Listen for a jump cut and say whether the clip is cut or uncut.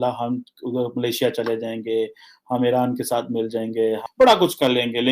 cut